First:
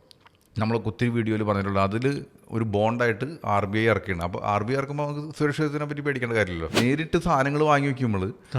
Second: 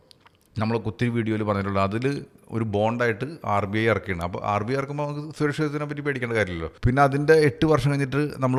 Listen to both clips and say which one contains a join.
first; 1 cut; at 6.7 s

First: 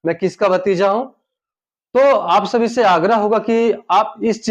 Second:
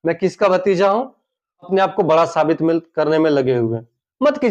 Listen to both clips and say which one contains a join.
second; 1 cut; at 1.7 s

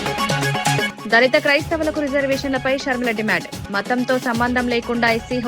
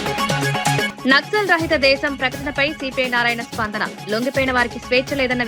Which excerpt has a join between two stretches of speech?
first; 1 cut; at 0.9 s

